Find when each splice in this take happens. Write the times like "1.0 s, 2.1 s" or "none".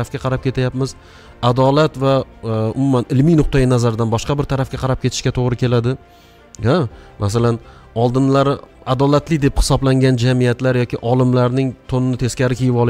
none

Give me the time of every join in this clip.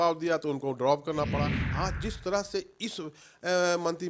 1.6 s

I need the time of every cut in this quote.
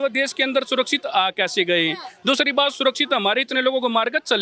none

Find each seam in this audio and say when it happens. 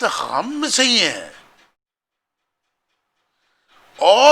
none

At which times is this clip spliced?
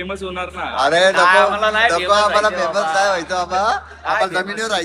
none

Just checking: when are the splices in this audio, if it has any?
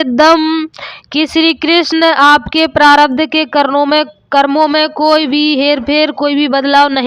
none

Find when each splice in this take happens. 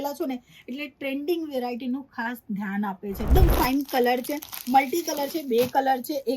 3.3 s

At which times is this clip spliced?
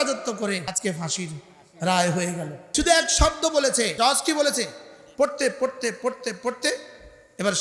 0.8 s, 2.6 s, 3.9 s

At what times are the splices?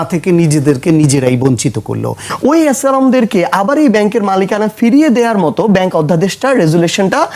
2.2 s

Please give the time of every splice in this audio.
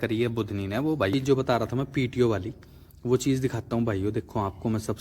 1.1 s

